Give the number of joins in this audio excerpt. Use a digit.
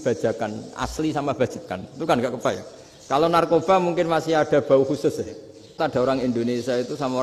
1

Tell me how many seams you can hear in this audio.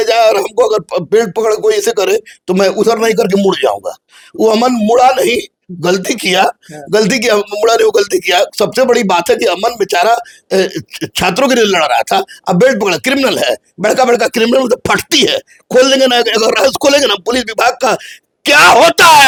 0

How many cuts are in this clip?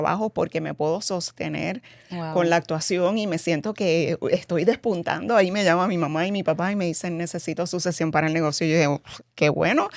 0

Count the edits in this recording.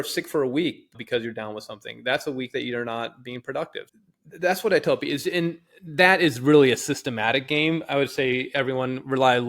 2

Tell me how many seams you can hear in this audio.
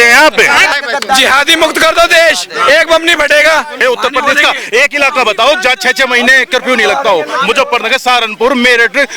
2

